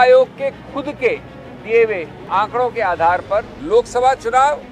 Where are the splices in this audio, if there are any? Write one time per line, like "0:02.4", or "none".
0:02.2
0:03.6